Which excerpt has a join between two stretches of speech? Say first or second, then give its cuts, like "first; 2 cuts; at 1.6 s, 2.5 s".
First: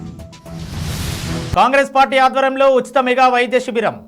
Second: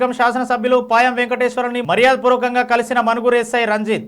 first; 1 cut; at 1.4 s